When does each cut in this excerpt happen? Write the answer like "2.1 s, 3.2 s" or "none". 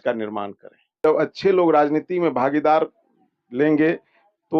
1.0 s